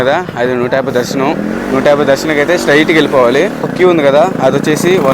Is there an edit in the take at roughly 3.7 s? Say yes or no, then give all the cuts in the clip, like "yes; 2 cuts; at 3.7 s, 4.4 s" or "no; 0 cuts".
yes; 1 cut; at 3.7 s